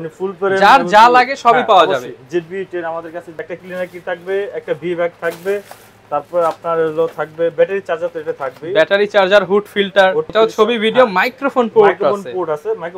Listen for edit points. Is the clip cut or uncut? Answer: cut